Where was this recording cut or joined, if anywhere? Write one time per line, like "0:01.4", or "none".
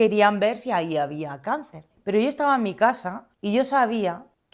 0:01.8